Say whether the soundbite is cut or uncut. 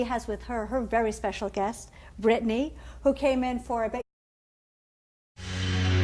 uncut